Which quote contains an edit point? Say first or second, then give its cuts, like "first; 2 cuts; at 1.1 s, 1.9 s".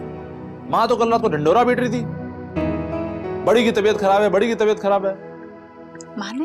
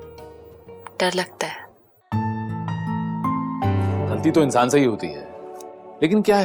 second; 1 cut; at 4.0 s